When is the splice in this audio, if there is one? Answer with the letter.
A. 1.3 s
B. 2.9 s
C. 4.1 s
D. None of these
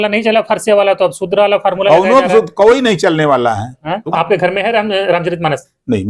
C